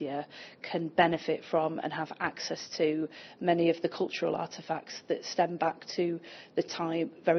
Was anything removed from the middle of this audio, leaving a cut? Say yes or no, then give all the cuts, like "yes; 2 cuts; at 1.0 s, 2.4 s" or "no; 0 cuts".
no; 0 cuts